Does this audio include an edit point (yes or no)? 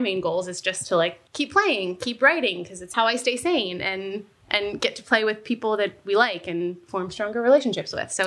yes